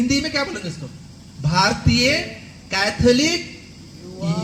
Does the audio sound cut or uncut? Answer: uncut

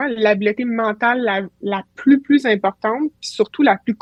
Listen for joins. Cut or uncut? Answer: uncut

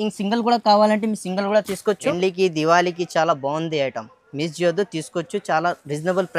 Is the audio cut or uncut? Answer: cut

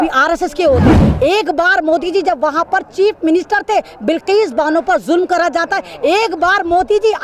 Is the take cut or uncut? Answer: cut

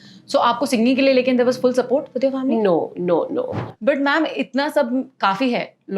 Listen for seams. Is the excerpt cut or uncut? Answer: cut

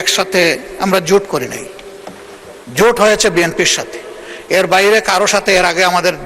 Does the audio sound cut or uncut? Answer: uncut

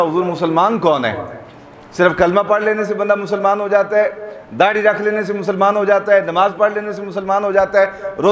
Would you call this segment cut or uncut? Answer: uncut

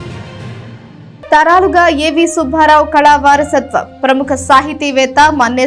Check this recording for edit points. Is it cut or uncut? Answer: uncut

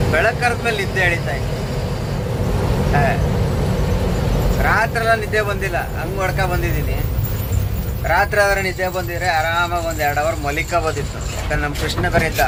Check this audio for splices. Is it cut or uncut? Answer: uncut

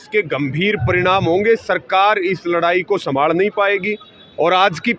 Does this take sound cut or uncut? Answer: uncut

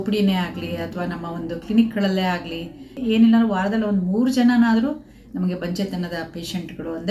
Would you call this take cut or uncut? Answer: cut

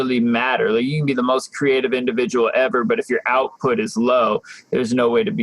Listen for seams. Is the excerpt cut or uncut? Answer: uncut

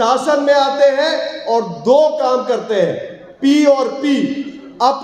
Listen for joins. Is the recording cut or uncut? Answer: uncut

